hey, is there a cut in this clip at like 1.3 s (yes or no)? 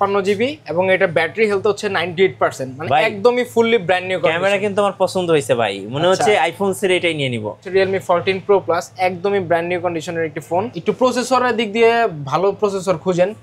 no